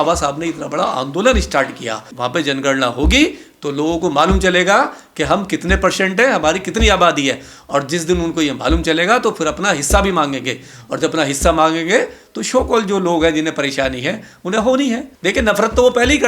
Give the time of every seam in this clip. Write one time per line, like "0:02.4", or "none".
0:02.1
0:15.1